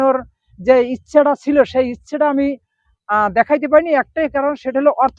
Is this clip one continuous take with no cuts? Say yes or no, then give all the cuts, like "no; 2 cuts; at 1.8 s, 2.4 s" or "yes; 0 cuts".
yes; 0 cuts